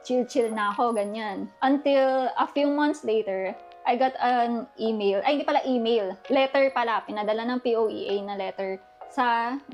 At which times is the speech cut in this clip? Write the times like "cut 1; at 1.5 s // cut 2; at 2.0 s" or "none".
none